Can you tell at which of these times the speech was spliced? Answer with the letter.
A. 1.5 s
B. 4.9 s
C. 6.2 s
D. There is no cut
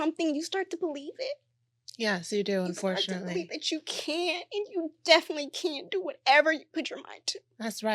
D